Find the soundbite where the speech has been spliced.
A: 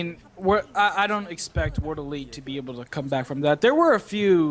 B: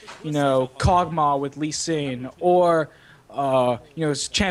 A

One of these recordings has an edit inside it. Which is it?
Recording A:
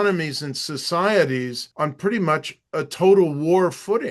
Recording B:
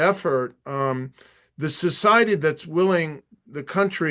A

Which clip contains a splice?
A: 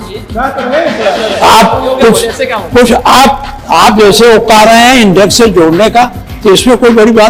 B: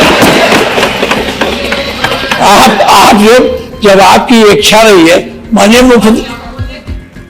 B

